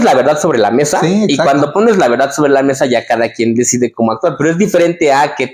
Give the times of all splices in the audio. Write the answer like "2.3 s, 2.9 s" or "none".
none